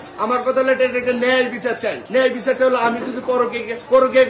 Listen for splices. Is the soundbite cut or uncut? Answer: uncut